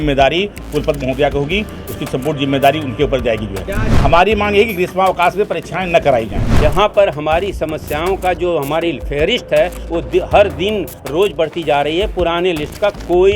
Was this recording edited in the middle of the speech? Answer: yes; 2 cuts; at 3.8 s, 6.4 s

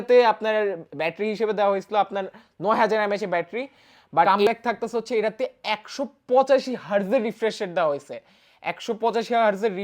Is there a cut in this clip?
yes; 1 cut; at 4.3 s

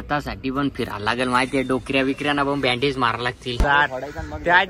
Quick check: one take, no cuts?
no; 1 cut; at 3.6 s

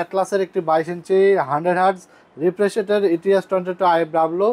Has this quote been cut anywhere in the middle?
no; 0 cuts

